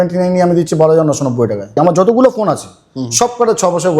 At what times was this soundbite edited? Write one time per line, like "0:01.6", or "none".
0:01.7